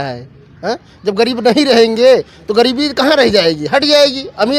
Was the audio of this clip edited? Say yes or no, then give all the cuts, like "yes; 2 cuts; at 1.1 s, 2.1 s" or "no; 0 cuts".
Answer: no; 0 cuts